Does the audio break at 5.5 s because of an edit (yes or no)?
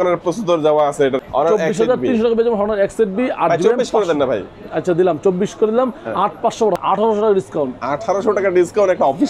no